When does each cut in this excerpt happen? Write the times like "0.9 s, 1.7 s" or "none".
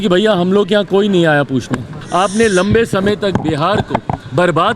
2.0 s